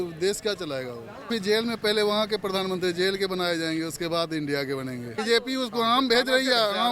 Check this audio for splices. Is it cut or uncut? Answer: cut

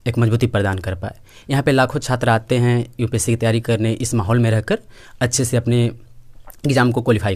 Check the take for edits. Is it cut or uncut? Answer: uncut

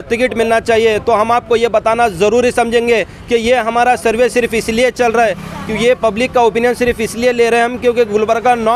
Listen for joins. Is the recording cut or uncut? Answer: uncut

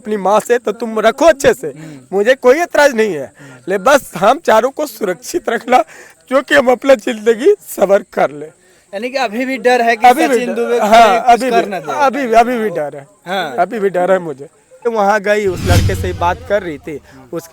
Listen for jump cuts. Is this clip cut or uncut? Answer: cut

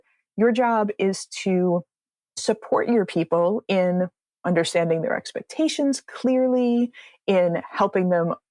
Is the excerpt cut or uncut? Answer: uncut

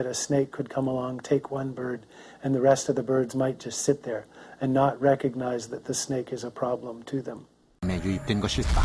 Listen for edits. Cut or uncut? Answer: cut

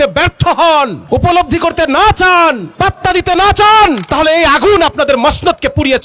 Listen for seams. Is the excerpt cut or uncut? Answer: cut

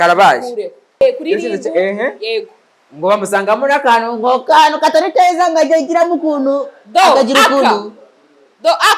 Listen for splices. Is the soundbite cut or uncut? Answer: cut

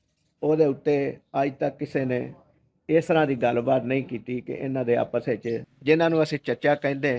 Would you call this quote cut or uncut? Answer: cut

